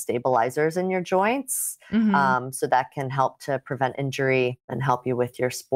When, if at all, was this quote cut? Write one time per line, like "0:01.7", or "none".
0:04.7